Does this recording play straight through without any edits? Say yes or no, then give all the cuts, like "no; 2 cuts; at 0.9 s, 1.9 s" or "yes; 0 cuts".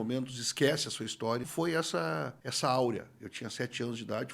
no; 2 cuts; at 1.5 s, 2.4 s